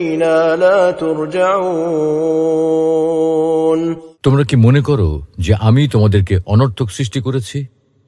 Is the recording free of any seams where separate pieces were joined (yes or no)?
no